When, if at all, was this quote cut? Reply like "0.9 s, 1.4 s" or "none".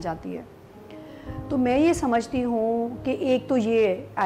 none